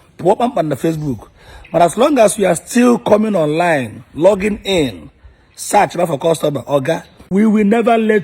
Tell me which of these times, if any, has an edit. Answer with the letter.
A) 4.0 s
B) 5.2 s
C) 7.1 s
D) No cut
C